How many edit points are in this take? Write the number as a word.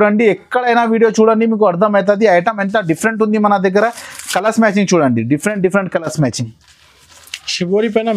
zero